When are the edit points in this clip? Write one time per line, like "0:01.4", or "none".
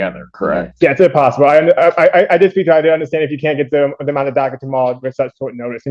none